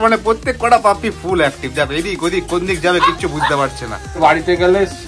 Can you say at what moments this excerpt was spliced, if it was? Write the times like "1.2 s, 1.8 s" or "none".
4.2 s